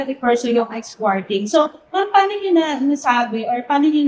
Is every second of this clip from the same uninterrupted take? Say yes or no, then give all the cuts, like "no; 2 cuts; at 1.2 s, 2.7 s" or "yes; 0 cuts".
yes; 0 cuts